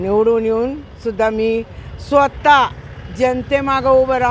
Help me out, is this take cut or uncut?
uncut